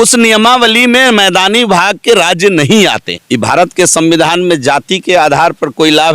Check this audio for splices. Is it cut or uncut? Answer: cut